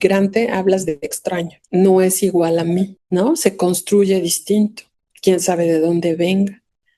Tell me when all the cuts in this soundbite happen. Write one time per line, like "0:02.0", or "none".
0:01.6
0:03.0